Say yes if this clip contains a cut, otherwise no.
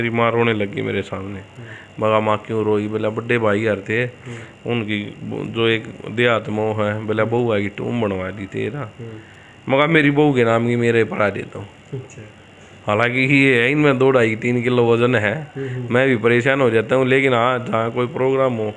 no